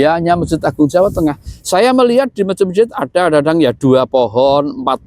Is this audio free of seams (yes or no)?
yes